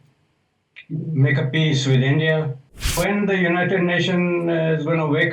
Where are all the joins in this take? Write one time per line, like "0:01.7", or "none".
0:03.0